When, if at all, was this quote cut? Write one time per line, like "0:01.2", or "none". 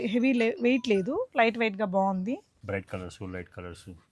0:02.5